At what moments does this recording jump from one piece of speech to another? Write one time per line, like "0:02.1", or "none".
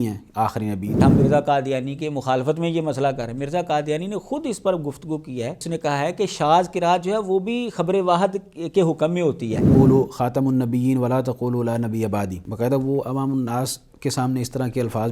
0:01.0
0:05.6
0:09.7
0:12.4

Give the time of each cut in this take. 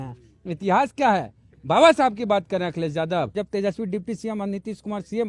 0:03.4

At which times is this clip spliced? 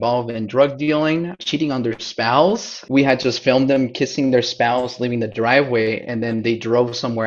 0:01.4
0:02.7

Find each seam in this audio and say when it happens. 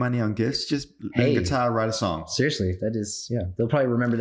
0:01.0

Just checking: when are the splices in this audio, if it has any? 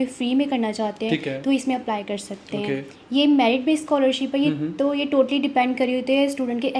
none

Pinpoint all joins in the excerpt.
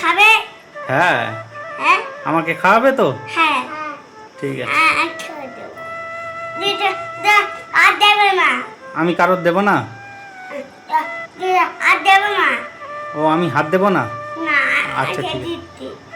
none

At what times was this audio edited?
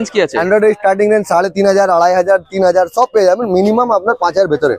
none

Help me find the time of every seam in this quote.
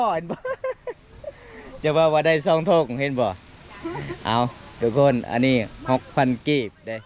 none

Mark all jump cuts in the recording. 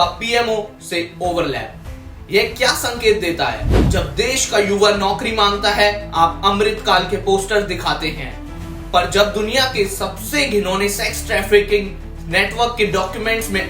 0:03.7

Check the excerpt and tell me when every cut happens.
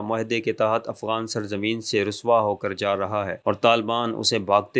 none

